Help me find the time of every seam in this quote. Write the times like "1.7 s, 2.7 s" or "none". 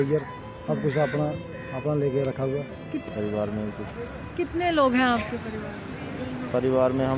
3.0 s

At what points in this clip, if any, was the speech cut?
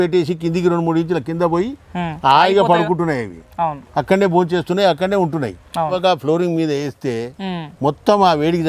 6.0 s

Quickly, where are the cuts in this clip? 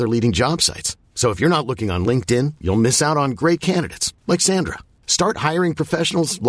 none

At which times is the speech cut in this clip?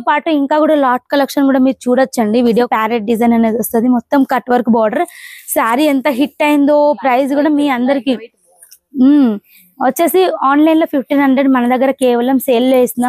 2.7 s

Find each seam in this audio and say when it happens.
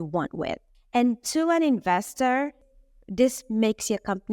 2.7 s

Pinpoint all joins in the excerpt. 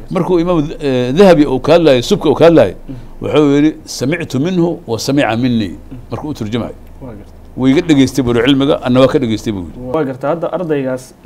9.9 s

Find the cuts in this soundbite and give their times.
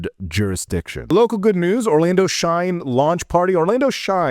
1.1 s

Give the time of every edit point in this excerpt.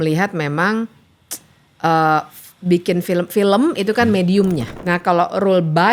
4.7 s

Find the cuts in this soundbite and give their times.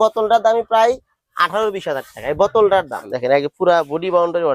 3.0 s

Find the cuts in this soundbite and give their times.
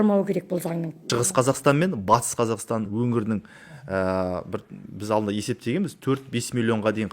0.9 s, 2.9 s

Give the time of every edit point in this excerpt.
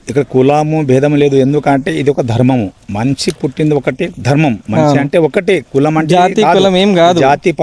none

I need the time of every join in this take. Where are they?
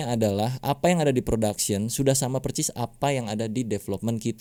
none

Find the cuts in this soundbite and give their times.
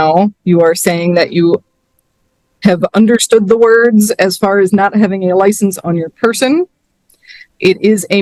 none

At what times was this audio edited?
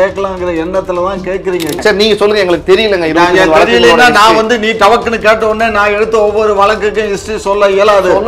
1.8 s

